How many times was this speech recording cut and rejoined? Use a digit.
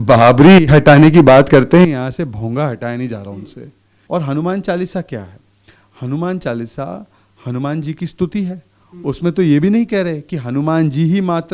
1